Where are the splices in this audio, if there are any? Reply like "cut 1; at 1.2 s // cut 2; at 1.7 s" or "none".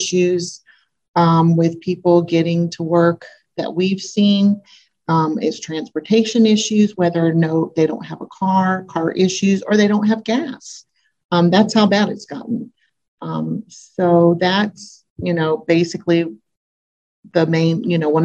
none

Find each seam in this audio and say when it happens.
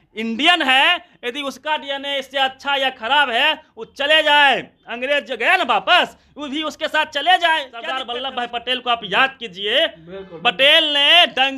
cut 1; at 8.0 s

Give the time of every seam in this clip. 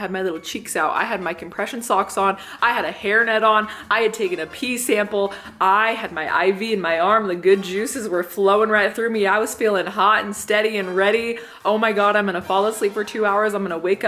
none

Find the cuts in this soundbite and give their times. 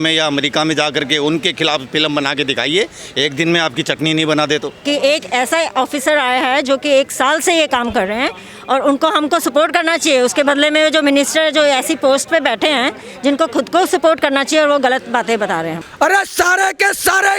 cut 1; at 4.8 s // cut 2; at 15.8 s

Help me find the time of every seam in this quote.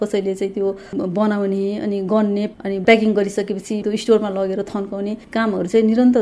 cut 1; at 2.5 s // cut 2; at 3.8 s

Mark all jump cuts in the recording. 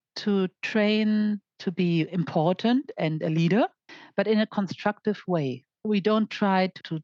none

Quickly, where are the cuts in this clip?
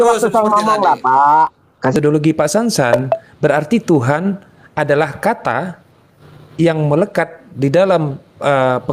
cut 1; at 1.9 s

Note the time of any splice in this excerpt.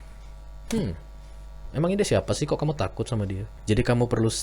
cut 1; at 3.5 s

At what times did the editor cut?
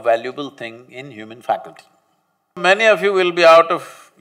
cut 1; at 2.6 s

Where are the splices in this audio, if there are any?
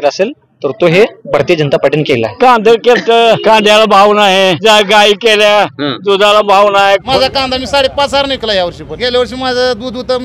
cut 1; at 2.4 s // cut 2; at 3.4 s // cut 3; at 4.6 s // cut 4; at 7.1 s // cut 5; at 8.9 s

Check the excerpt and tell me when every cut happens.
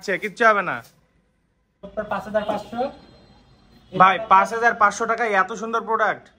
cut 1; at 1.9 s

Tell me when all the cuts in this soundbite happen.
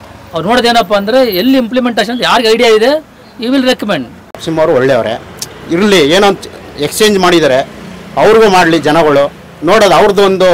cut 1; at 4.4 s

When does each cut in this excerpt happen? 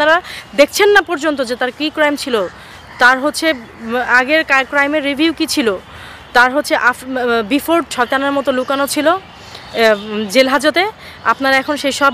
cut 1; at 7.9 s

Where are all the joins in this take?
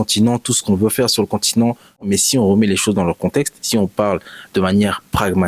cut 1; at 2.1 s

